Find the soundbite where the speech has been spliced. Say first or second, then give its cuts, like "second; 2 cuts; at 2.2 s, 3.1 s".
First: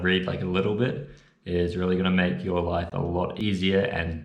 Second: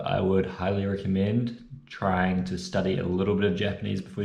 first; 1 cut; at 3.3 s